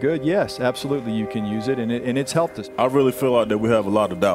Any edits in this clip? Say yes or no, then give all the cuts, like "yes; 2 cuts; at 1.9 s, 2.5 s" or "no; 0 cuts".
no; 0 cuts